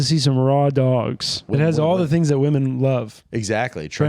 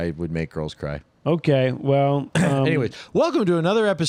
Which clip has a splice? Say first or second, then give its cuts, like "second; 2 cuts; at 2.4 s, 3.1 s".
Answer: first; 1 cut; at 1.5 s